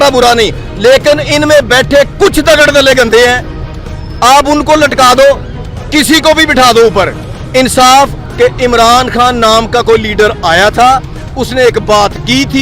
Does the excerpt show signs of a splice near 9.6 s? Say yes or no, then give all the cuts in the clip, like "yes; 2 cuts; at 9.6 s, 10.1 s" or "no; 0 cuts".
no; 1 cut; at 8.2 s